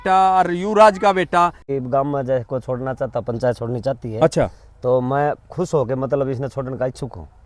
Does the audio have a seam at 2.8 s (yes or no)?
no